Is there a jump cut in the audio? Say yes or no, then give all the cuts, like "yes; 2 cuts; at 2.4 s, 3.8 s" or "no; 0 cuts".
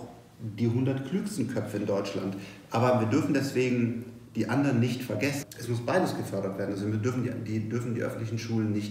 yes; 1 cut; at 5.4 s